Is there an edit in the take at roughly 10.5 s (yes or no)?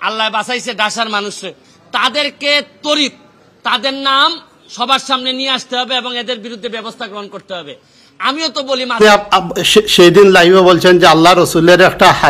no